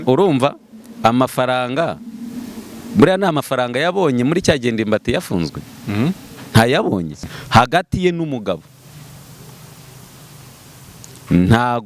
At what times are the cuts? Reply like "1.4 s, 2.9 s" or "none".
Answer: 7.3 s